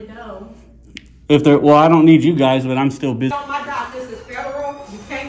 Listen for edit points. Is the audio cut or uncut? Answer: cut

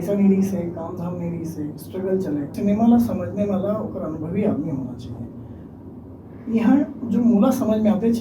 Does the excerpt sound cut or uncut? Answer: cut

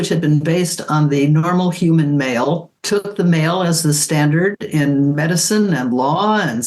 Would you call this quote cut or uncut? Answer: cut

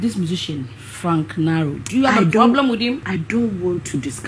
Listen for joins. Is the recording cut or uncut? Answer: cut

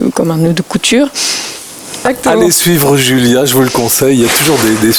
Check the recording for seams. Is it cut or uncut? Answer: cut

